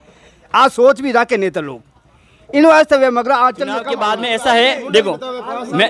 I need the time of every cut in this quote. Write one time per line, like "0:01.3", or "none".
0:03.9